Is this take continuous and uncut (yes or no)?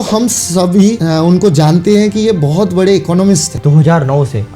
no